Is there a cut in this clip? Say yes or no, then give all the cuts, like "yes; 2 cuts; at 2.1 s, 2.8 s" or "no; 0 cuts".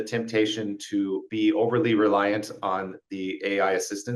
yes; 1 cut; at 1.3 s